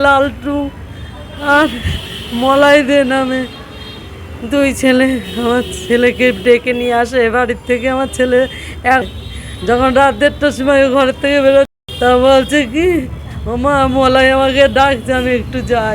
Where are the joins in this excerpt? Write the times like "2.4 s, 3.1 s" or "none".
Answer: 9.0 s, 11.7 s